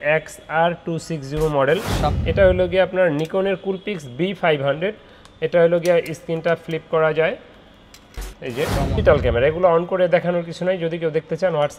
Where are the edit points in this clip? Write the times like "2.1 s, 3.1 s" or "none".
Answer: 2.2 s, 9.0 s